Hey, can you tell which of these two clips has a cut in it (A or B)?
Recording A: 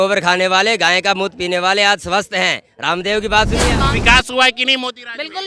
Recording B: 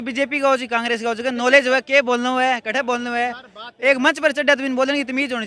A